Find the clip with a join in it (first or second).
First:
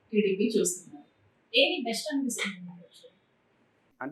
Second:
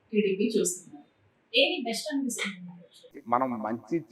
second